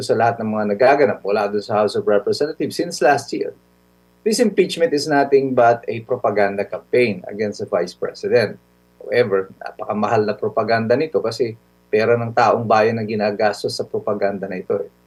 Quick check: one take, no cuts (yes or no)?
yes